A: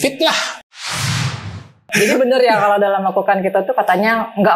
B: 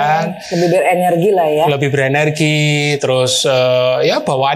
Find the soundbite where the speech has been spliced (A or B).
A